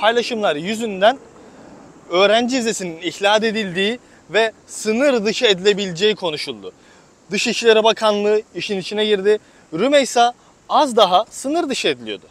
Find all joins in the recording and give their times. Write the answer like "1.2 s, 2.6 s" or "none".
none

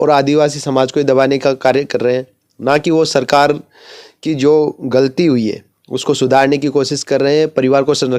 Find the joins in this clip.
none

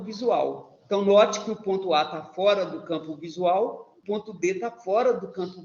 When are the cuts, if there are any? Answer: 3.9 s

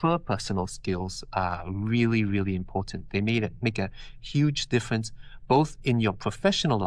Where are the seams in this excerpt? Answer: none

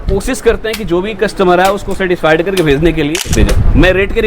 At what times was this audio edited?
3.3 s

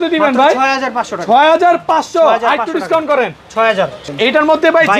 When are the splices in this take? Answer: 4.0 s

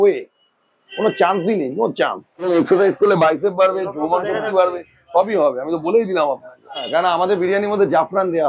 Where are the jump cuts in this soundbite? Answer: 2.5 s, 6.8 s

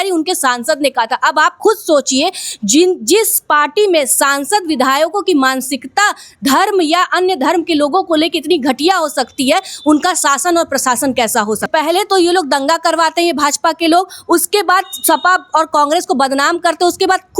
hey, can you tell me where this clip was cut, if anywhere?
11.7 s

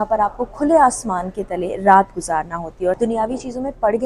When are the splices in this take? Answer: 3.0 s

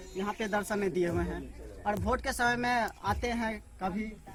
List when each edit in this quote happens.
none

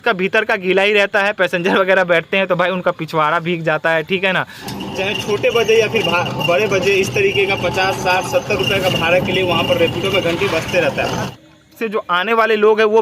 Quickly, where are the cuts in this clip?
4.7 s, 11.3 s

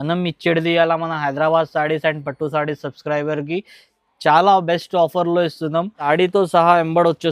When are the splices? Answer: 6.1 s

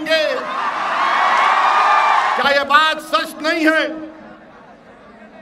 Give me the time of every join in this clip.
2.4 s

